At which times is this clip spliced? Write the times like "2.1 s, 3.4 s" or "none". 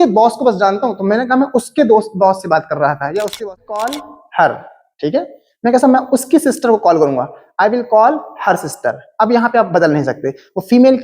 3.4 s

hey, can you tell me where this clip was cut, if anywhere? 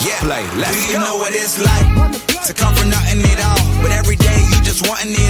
none

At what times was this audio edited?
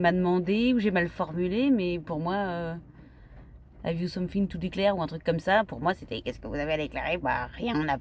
none

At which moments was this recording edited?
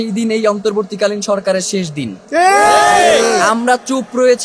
none

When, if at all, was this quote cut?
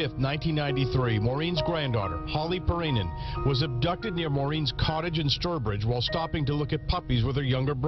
6.7 s

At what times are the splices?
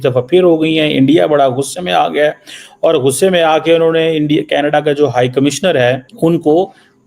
6.1 s

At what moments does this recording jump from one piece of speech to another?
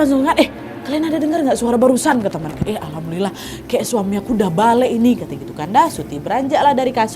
2.6 s

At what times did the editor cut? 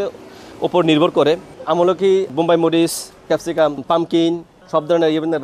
2.3 s, 3.4 s, 4.5 s

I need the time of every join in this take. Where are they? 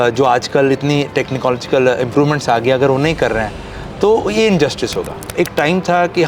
5.2 s

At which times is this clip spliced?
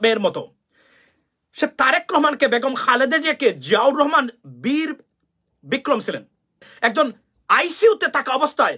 6.7 s

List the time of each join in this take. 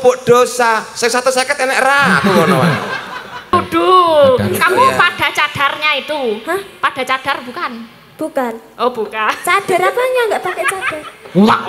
3.5 s

